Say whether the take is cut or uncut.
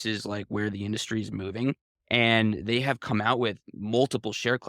uncut